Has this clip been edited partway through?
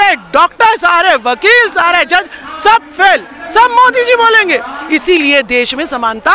no; 0 cuts

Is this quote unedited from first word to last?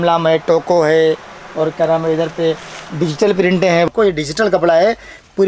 no; 1 cut; at 3.9 s

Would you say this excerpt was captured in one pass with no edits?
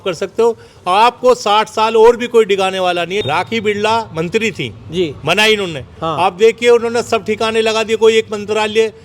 no; 1 cut; at 3.2 s

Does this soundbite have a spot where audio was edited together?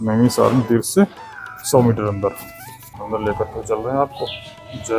yes; 1 cut; at 3.0 s

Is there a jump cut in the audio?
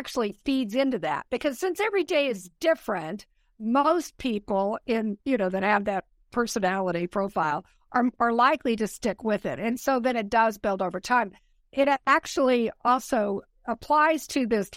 no; 0 cuts

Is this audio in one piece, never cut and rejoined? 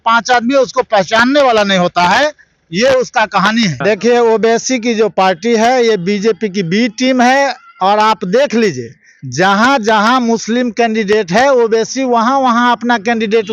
no; 1 cut; at 3.8 s

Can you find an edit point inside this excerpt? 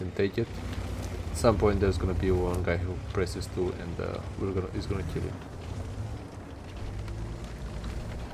no; 0 cuts

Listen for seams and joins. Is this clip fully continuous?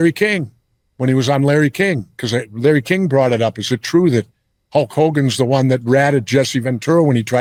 yes; 0 cuts

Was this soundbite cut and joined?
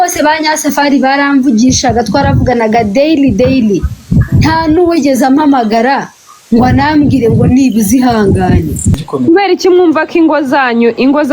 yes; 1 cut; at 8.9 s

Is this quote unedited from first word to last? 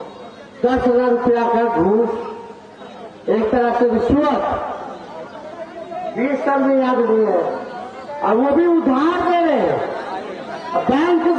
yes; 0 cuts

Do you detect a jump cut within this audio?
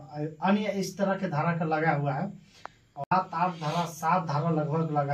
yes; 1 cut; at 3.1 s

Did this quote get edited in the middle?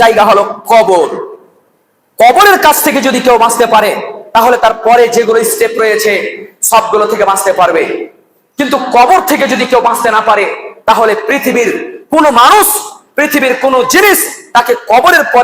no; 0 cuts

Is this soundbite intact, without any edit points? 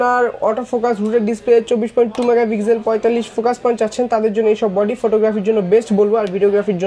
yes; 0 cuts

